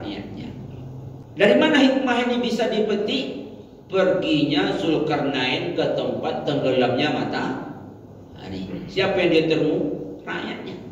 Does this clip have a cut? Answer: yes; 1 cut; at 1.2 s

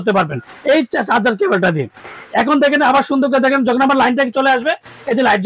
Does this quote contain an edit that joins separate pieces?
no; 0 cuts

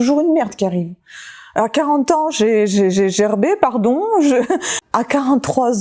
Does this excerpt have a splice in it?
yes; 1 cut; at 4.8 s

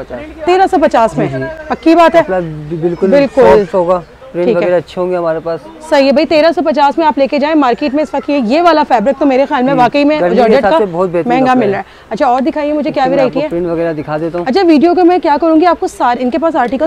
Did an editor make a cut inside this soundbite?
no; 0 cuts

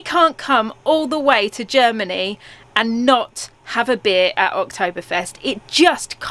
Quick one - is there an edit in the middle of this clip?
no; 0 cuts

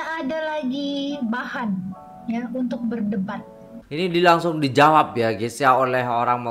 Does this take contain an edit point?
yes; 1 cut; at 3.8 s

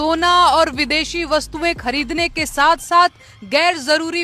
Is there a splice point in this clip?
no; 0 cuts

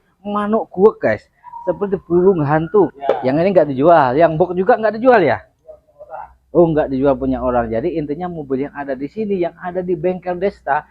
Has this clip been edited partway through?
yes; 1 cut; at 2.9 s

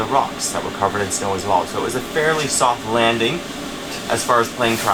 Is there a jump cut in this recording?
no; 0 cuts

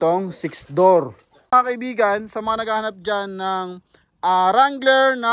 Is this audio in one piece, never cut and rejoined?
no; 1 cut; at 1.5 s

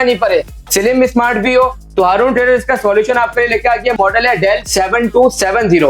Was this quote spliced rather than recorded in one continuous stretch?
no; 0 cuts

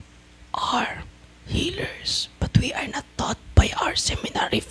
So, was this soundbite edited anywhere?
no; 0 cuts

